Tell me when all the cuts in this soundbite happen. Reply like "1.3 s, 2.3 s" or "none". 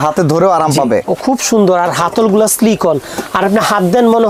none